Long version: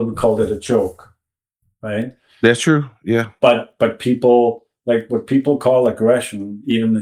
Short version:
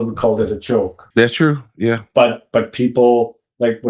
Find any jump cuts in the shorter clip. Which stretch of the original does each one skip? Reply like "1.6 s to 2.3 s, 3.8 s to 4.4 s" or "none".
1.0 s to 2.3 s